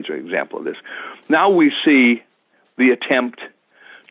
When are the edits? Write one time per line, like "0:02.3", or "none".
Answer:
none